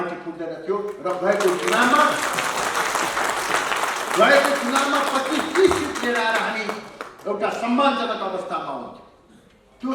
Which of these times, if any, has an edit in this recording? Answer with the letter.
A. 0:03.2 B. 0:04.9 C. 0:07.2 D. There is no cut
D